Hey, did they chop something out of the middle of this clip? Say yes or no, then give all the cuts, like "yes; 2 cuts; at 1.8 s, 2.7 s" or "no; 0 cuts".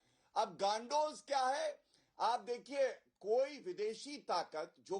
no; 0 cuts